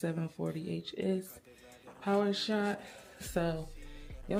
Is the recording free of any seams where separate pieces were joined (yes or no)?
yes